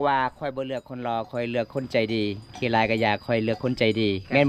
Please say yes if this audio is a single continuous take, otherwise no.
yes